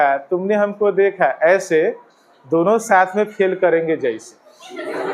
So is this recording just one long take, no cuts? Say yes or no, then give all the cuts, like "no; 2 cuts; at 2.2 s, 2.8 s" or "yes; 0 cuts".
yes; 0 cuts